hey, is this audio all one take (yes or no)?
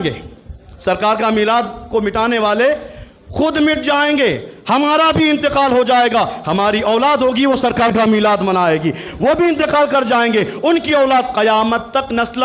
yes